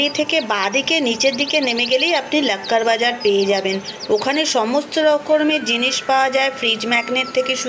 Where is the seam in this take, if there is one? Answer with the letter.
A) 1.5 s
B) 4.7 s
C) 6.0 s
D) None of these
D